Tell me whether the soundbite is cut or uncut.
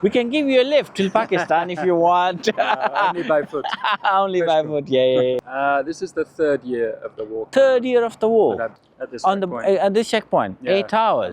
cut